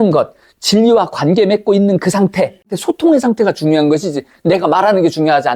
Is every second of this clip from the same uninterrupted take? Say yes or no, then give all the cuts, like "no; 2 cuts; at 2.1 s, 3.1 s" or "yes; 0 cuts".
no; 1 cut; at 2.8 s